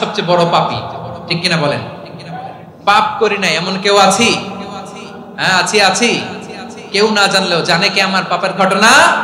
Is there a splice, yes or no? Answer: no